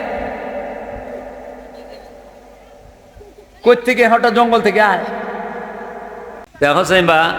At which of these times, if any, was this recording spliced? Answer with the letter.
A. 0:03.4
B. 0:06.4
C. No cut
B